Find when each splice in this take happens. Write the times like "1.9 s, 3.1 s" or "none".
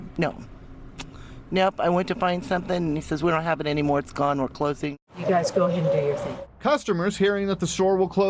5.3 s